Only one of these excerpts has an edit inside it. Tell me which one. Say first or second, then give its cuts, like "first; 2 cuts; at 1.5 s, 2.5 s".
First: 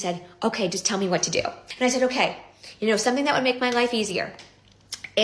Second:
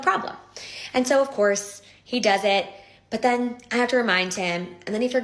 first; 1 cut; at 1.6 s